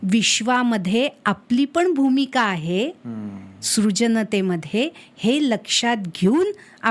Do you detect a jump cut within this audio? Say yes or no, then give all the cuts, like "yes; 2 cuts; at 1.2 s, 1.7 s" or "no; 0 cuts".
no; 0 cuts